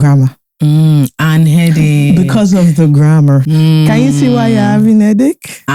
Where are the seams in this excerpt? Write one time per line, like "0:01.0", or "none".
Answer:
0:03.5